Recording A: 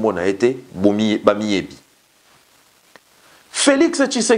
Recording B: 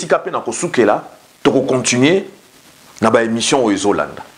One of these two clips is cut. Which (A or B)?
A